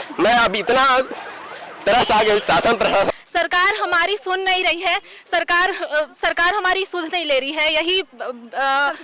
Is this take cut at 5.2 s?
no; 1 cut; at 3.1 s

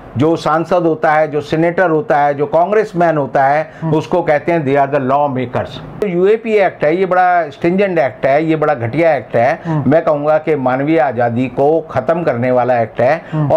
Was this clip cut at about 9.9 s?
no; 1 cut; at 6.0 s

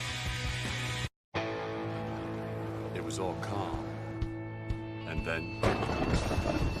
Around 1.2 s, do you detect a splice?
yes; 1 cut; at 1.2 s

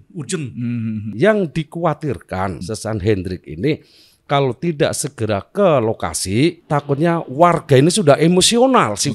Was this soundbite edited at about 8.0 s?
no; 3 cuts; at 1.1 s, 2.6 s, 6.6 s

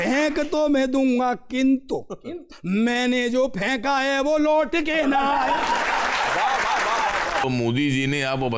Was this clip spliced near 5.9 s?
no; 2 cuts; at 2.6 s, 7.4 s

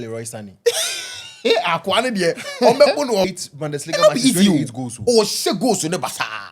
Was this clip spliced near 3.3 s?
yes; 1 cut; at 3.3 s

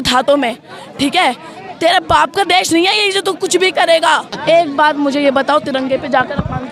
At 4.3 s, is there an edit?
yes; 1 cut; at 4.3 s

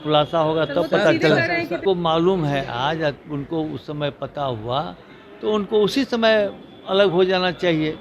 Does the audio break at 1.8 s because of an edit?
yes; 1 cut; at 1.8 s

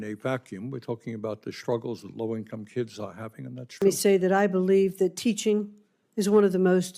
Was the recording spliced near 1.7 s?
no; 1 cut; at 3.8 s

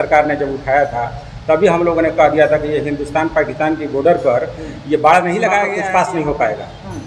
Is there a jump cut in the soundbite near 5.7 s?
yes; 1 cut; at 5.7 s

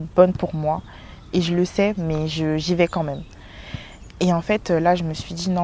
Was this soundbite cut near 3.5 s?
no; 0 cuts

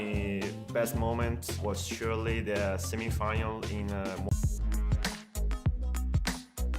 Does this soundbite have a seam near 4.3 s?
yes; 1 cut; at 4.3 s

